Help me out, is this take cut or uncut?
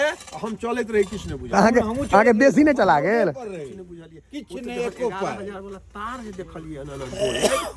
uncut